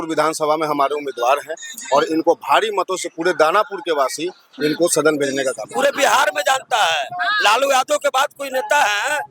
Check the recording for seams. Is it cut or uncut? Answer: cut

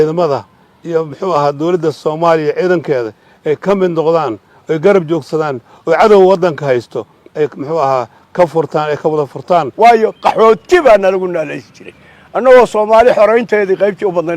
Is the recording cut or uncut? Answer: cut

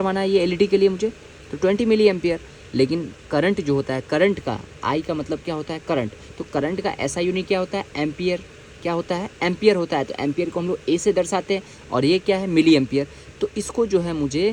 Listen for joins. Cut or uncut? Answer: uncut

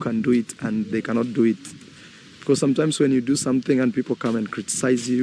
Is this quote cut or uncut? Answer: cut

